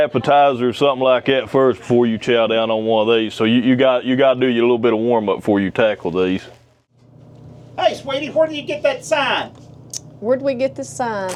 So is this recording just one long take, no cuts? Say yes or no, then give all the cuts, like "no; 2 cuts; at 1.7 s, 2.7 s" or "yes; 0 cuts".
yes; 0 cuts